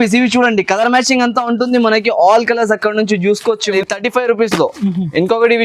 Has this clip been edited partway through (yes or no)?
yes